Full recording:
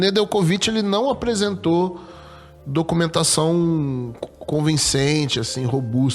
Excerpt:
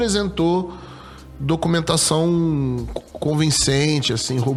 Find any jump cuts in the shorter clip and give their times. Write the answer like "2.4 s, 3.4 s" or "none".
none